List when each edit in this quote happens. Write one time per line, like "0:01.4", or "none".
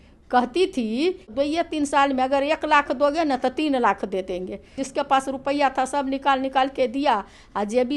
0:01.3
0:04.8